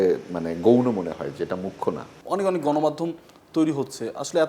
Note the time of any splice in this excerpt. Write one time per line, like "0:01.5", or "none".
0:02.1